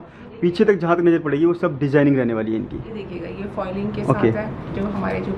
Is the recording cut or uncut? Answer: uncut